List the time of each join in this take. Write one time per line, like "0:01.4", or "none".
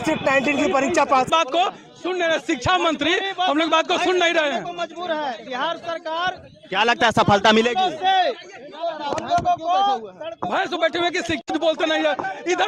0:01.3